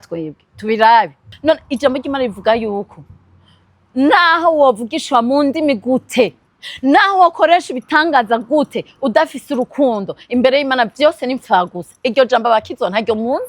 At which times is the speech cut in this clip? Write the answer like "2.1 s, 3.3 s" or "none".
1.3 s